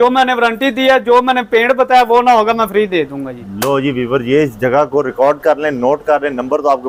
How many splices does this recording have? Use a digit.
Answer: 0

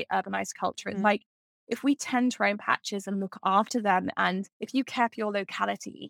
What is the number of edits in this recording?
1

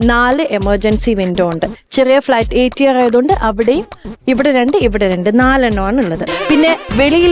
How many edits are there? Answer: 1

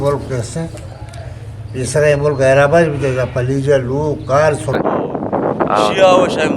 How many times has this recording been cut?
1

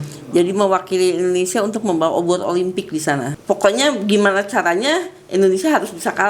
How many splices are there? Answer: 1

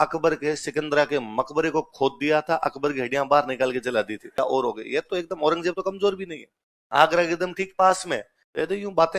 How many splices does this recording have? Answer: 1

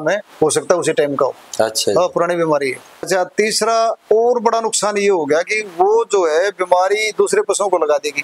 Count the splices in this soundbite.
1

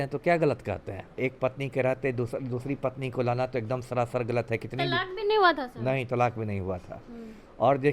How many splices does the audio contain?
1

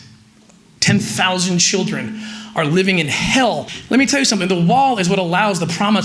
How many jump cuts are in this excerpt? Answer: 1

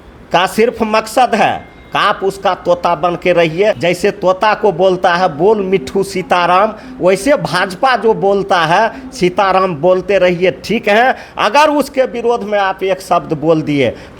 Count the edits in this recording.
1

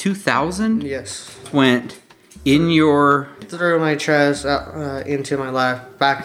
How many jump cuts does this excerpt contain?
2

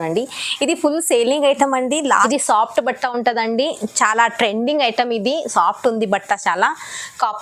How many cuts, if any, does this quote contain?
1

